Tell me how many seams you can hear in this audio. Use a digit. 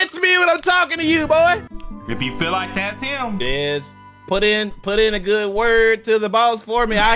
1